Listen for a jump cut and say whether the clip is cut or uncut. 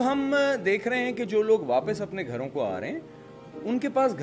uncut